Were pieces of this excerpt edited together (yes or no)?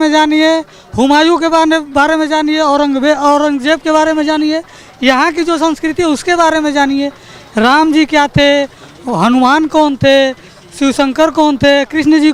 no